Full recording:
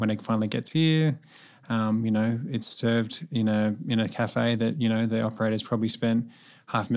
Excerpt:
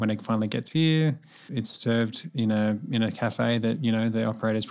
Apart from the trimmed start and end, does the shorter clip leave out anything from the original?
yes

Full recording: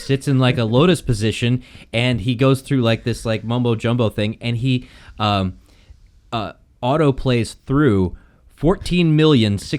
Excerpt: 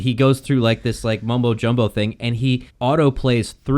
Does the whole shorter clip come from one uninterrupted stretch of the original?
no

